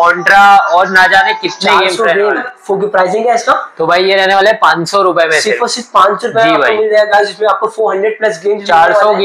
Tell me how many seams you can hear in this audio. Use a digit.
0